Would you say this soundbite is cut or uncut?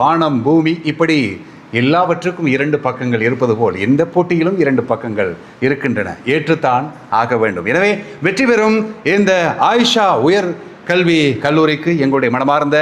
uncut